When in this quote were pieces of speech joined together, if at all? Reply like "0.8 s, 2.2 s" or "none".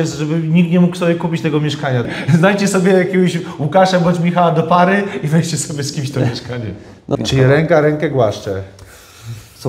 2.1 s, 7.2 s